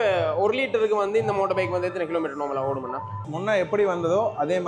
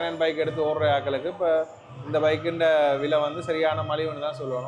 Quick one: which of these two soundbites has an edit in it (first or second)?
first